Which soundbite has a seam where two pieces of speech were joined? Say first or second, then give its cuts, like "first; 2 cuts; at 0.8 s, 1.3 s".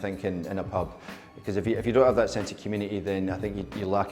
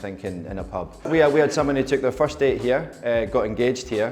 second; 1 cut; at 1.0 s